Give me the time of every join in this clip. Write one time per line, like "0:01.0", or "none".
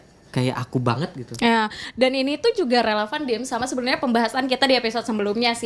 none